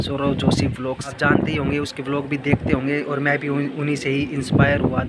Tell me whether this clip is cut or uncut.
cut